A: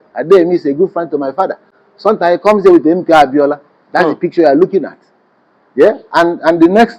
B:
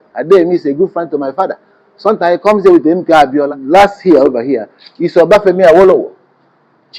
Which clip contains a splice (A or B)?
B